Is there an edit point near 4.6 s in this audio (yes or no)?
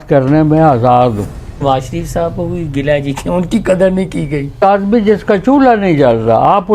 yes